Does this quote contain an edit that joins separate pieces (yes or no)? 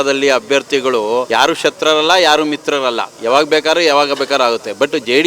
yes